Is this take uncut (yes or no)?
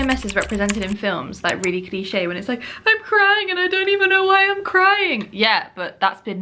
yes